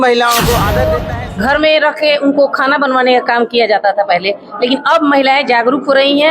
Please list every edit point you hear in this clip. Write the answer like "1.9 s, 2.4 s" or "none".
1.0 s